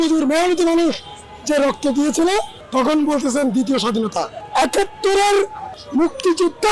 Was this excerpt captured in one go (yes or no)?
yes